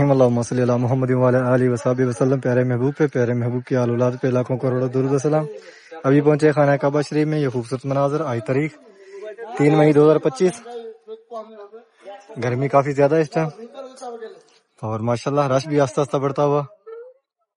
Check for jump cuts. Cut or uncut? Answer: uncut